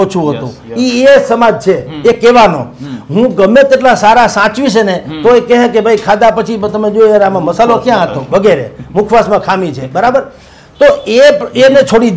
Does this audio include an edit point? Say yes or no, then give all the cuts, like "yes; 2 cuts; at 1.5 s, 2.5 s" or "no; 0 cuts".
no; 0 cuts